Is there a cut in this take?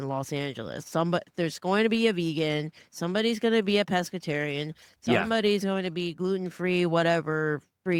no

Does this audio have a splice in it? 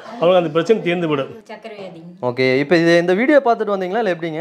yes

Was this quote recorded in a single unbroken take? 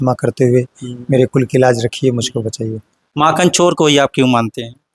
yes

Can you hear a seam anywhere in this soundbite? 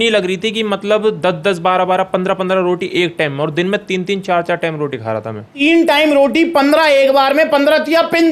yes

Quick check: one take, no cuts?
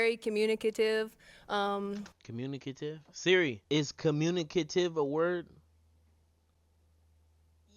no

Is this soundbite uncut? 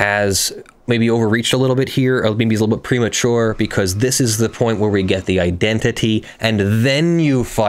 yes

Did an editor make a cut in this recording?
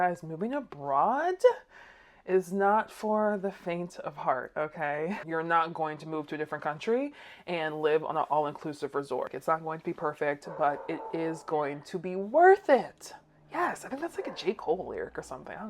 yes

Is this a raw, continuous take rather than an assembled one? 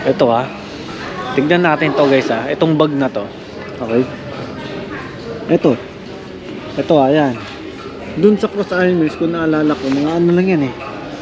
yes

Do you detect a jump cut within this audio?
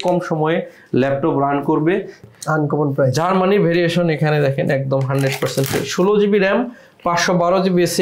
yes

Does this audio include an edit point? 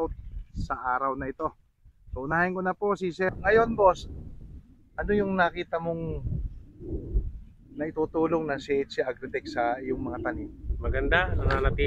yes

